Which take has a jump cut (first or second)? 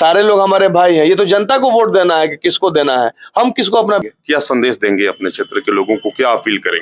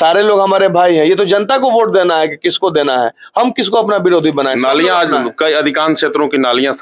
first